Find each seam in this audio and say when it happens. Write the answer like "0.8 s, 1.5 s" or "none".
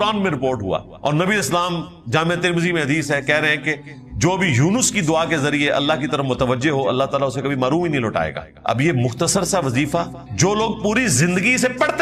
0.9 s, 8.5 s, 10.2 s